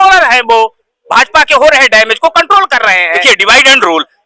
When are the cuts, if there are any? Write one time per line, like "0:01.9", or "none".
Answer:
0:03.2